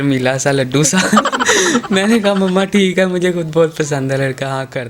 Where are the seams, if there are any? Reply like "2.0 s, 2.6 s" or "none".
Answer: none